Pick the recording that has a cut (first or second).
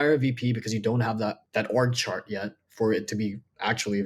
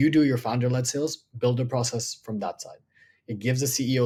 first